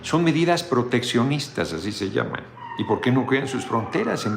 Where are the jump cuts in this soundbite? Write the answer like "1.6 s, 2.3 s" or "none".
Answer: 2.6 s